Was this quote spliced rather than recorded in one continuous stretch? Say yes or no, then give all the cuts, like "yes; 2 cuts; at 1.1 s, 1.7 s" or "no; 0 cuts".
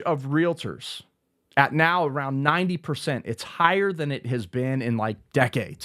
no; 0 cuts